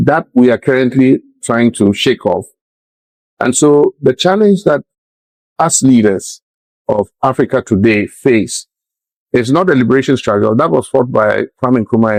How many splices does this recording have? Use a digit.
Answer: 0